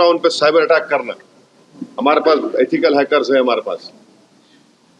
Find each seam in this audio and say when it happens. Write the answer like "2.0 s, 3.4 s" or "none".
none